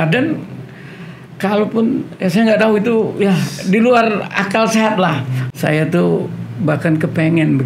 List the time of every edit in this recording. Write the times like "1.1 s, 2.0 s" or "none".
5.4 s